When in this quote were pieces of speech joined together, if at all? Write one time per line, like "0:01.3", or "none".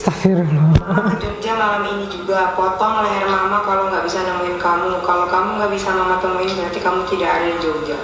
none